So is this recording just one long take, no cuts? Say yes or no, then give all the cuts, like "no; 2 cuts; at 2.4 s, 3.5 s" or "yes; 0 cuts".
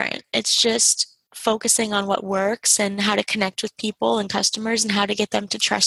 yes; 0 cuts